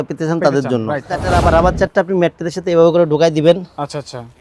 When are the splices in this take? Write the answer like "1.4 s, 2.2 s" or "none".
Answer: 1.1 s

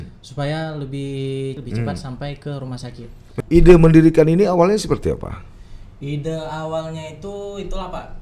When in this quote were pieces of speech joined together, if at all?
1.6 s, 3.4 s

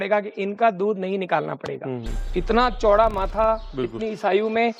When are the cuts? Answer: 2.3 s

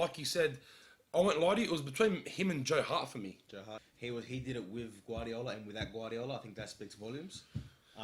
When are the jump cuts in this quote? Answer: 3.7 s

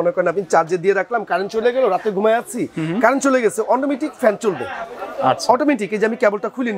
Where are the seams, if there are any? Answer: none

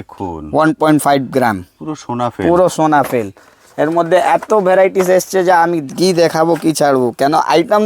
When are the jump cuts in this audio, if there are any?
none

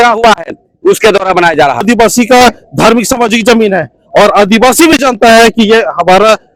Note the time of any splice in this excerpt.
1.8 s

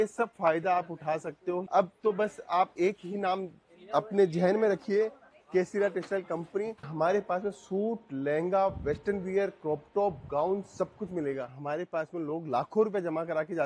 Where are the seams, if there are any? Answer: 1.7 s, 6.8 s, 11.6 s

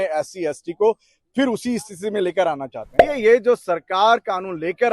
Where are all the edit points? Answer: 2.9 s

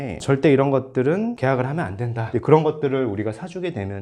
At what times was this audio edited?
2.2 s

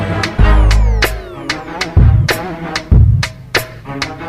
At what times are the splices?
1.1 s, 3.1 s

